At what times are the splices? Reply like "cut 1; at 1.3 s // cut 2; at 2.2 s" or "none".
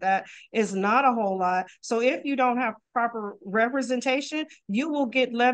none